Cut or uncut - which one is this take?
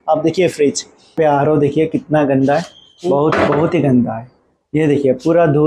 cut